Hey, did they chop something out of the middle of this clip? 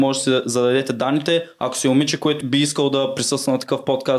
yes; 1 cut; at 2.4 s

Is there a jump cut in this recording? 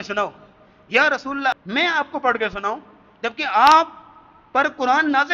yes; 1 cut; at 1.5 s

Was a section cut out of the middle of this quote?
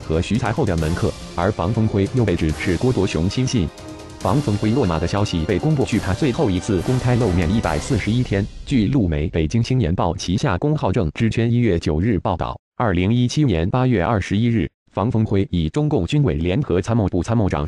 yes; 1 cut; at 3.5 s

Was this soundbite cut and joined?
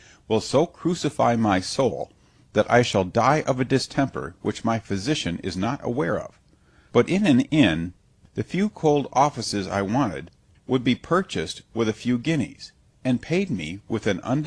no; 0 cuts

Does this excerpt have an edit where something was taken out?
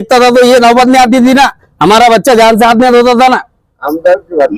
no; 0 cuts

